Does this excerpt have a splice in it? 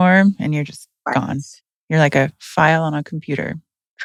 no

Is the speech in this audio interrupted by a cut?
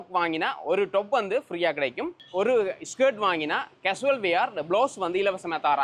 no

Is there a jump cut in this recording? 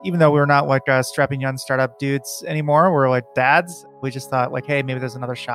yes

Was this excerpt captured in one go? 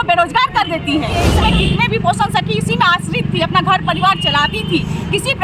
no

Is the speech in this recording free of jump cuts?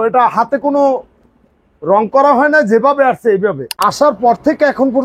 no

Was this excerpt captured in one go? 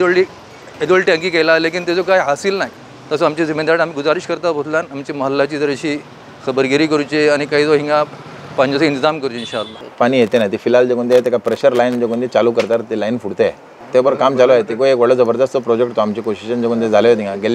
yes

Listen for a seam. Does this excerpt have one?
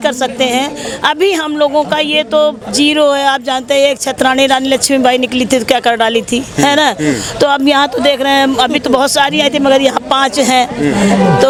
no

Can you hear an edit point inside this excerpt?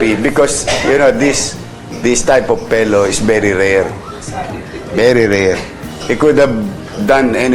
no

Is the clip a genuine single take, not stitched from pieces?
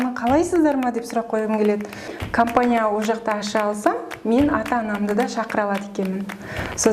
no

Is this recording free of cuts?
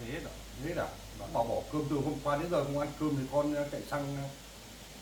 yes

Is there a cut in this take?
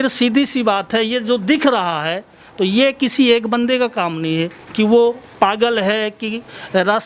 no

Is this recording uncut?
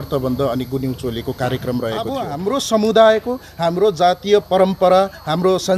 no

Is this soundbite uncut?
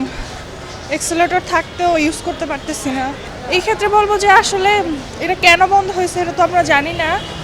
no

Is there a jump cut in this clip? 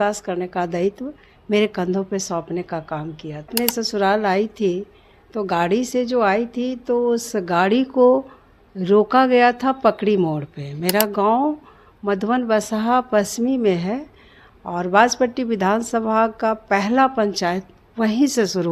yes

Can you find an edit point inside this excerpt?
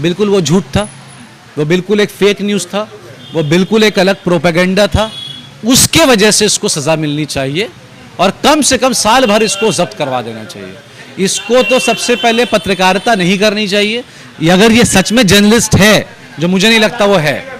no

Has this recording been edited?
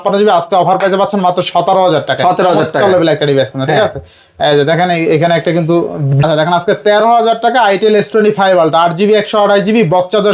yes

